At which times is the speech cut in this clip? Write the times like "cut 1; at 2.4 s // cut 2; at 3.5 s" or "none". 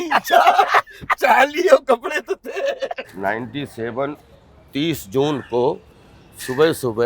cut 1; at 3.1 s